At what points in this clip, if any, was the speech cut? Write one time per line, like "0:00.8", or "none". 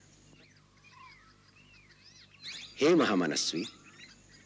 none